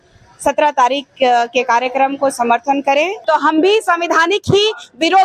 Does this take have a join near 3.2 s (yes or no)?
yes